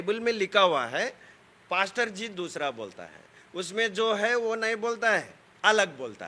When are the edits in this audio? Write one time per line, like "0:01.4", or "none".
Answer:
none